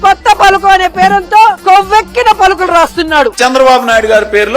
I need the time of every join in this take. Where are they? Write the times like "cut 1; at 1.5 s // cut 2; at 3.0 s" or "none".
cut 1; at 3.3 s